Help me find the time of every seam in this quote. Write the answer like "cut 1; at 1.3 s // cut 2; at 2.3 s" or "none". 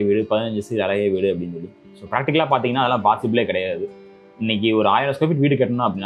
none